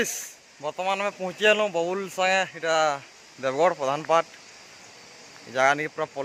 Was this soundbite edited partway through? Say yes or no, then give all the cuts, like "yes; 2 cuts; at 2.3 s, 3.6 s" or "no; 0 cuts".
no; 0 cuts